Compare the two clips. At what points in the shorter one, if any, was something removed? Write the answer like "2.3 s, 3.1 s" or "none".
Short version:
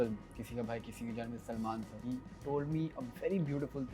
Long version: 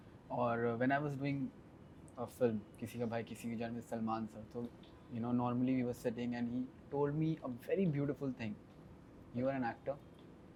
2.0 s